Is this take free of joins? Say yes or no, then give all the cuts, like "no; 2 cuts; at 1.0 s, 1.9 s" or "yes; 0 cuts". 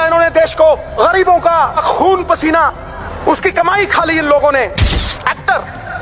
no; 4 cuts; at 0.9 s, 1.8 s, 3.0 s, 4.9 s